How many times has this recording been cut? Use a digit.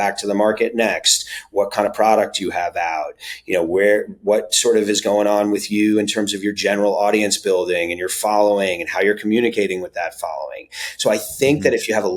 0